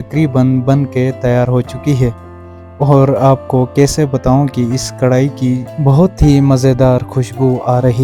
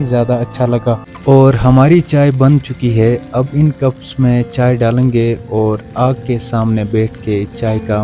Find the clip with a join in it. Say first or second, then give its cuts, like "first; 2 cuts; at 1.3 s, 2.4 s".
second; 1 cut; at 1.0 s